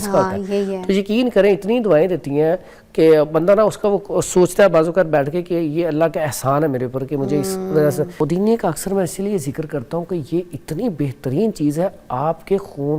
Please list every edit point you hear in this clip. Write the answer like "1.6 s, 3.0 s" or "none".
8.1 s